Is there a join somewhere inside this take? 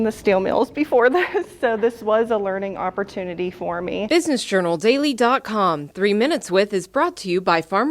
yes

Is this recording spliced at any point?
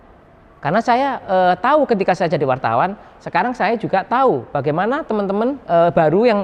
no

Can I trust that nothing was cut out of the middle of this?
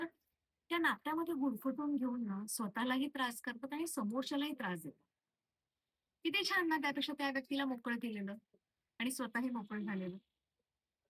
yes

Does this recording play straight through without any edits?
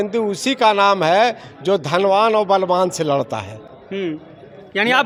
yes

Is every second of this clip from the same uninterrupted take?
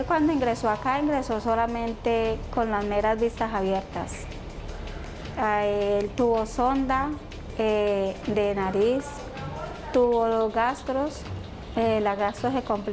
yes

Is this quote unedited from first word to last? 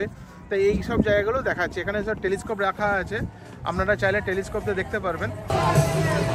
no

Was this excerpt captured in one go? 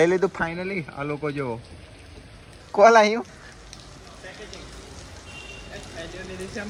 yes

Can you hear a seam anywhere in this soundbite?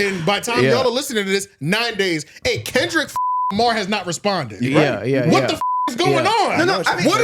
no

